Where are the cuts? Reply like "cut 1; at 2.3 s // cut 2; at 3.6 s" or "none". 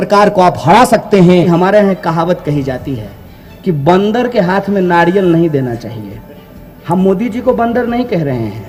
cut 1; at 1.3 s